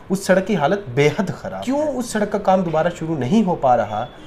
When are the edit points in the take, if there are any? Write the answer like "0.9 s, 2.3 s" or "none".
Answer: 1.5 s